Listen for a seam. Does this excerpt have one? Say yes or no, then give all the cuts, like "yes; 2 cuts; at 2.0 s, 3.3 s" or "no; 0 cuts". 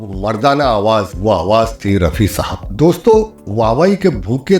yes; 1 cut; at 2.7 s